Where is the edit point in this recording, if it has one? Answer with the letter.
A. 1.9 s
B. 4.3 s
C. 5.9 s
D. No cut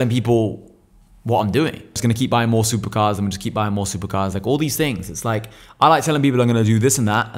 A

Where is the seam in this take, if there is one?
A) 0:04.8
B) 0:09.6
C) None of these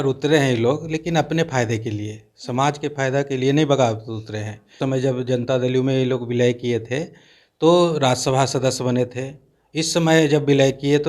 A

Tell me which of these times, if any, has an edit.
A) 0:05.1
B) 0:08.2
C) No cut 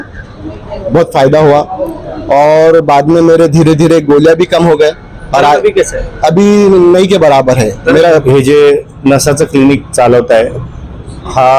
B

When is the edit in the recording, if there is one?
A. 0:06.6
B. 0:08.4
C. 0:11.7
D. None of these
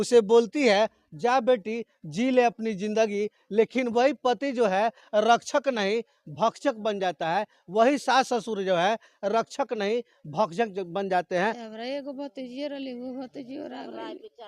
C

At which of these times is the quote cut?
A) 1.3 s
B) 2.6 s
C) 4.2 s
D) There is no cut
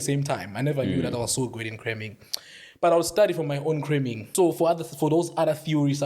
C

